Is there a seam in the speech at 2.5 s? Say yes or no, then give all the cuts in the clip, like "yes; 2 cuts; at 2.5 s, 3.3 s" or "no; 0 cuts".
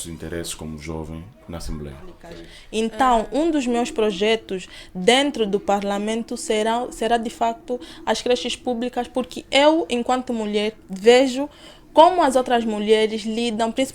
yes; 1 cut; at 2.5 s